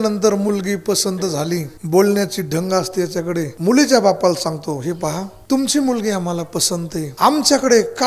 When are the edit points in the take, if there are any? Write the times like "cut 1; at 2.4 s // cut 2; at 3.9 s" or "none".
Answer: cut 1; at 1.7 s // cut 2; at 3.5 s // cut 3; at 5.3 s // cut 4; at 7.1 s